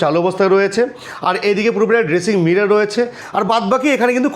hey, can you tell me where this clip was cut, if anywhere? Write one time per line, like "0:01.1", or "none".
0:03.2